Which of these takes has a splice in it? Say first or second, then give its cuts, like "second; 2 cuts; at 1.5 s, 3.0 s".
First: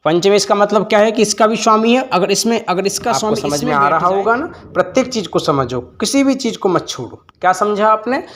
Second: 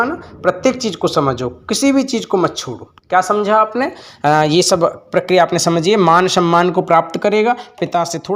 first; 1 cut; at 3.4 s